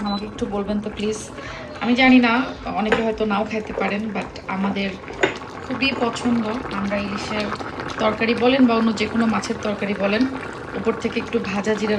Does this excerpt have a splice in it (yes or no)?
no